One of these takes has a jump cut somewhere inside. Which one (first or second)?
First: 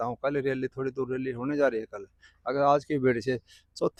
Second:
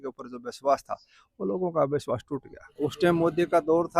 second